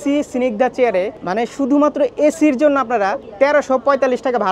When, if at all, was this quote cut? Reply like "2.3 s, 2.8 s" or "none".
1.2 s, 3.2 s